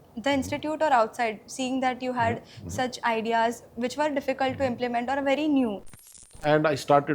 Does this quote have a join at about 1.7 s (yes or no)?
no